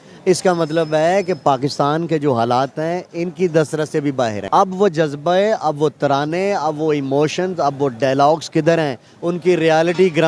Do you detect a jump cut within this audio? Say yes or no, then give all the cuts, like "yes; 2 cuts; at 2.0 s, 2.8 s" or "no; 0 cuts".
yes; 2 cuts; at 4.4 s, 5.9 s